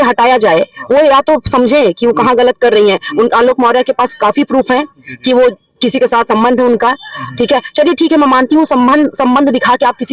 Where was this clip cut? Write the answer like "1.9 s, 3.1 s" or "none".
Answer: none